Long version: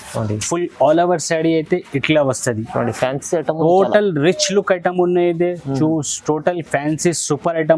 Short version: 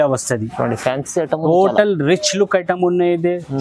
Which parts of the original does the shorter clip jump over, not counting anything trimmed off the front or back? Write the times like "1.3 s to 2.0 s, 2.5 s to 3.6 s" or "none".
none